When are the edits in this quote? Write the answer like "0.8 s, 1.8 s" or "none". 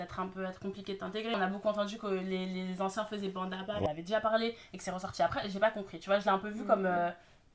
1.3 s, 3.9 s